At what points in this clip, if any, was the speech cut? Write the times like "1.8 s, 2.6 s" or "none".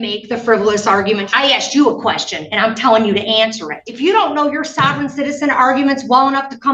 1.3 s, 3.8 s